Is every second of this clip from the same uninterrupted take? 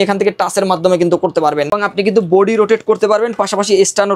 no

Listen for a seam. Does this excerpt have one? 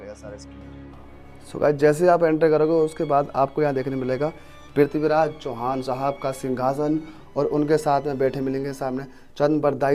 no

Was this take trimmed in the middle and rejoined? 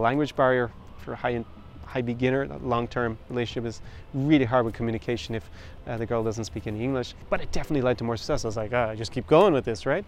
yes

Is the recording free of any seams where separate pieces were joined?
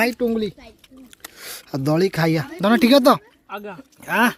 yes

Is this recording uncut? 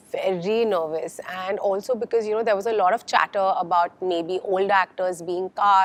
yes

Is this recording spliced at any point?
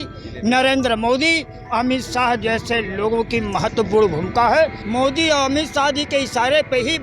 yes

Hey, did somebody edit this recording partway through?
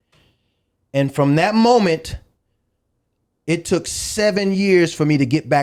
no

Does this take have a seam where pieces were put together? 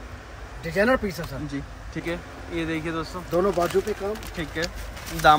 yes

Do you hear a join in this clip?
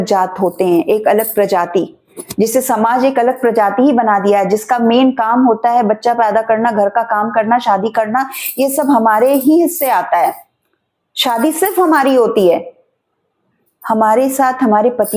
no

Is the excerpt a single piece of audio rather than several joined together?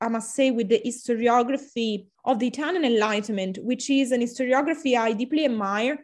no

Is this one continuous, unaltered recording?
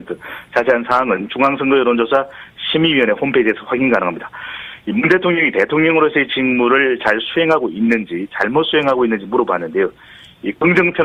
yes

